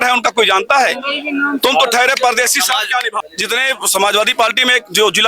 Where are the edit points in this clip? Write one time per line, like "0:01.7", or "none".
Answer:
0:03.1